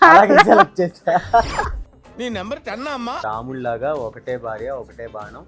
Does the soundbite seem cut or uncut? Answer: cut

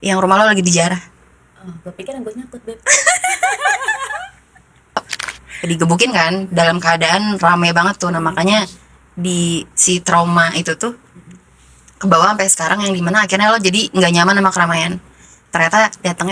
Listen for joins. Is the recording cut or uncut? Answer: cut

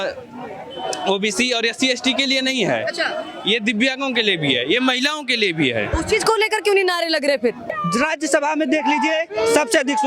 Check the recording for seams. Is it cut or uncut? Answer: cut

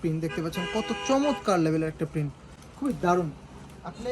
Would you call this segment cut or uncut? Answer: uncut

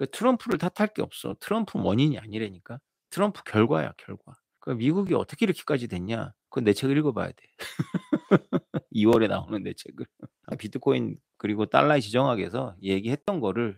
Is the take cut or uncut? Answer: cut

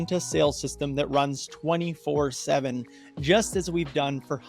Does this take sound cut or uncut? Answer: cut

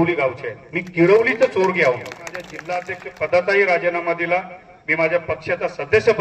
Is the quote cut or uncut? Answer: cut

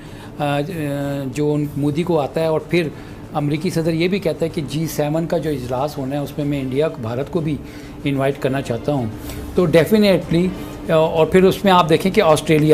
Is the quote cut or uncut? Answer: uncut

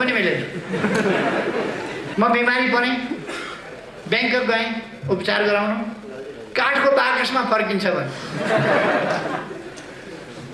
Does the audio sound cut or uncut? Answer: cut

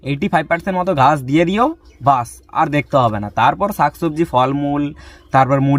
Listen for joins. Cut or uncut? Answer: uncut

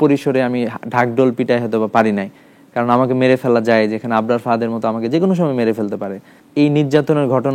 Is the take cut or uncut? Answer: cut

